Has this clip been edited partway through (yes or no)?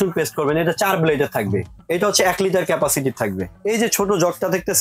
yes